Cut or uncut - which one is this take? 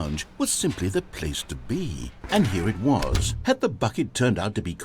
cut